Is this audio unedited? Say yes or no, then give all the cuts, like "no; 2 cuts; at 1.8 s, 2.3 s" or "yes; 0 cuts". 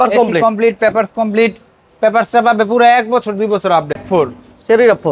no; 1 cut; at 4.0 s